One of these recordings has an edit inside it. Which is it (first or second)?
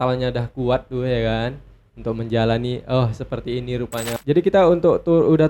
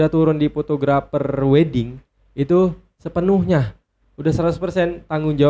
first